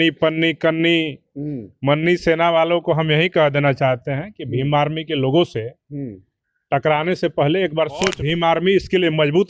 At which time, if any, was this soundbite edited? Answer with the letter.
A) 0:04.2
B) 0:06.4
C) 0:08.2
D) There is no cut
C